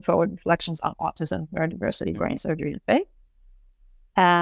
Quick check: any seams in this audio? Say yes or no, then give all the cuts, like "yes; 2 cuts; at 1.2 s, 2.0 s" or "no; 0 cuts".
no; 0 cuts